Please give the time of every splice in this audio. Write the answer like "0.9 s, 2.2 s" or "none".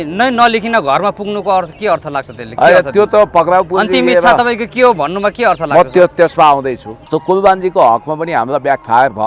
7.1 s